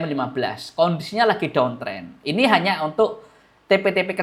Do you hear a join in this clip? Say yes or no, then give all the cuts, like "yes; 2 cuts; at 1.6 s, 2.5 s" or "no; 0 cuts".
no; 0 cuts